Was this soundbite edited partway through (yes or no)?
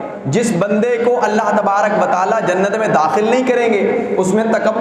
no